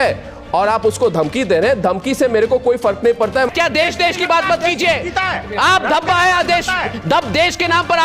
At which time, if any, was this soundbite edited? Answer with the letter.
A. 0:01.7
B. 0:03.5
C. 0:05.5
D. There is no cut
B